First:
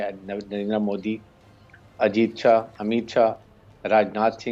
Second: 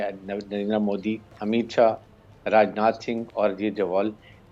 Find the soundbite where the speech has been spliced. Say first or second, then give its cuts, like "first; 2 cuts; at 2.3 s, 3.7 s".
second; 1 cut; at 1.4 s